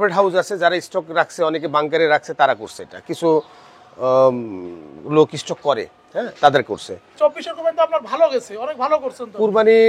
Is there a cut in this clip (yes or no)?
yes